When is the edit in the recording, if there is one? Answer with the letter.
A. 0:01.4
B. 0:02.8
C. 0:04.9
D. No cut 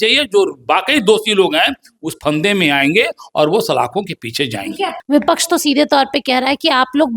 C